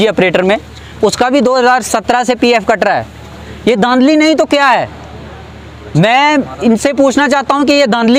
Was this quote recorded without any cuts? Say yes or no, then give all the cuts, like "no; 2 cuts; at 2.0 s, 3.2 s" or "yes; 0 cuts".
yes; 0 cuts